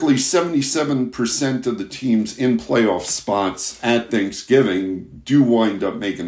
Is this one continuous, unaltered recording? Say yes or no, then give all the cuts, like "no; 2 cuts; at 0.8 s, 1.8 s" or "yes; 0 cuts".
yes; 0 cuts